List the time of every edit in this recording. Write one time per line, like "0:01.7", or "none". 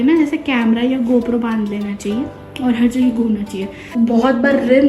0:03.8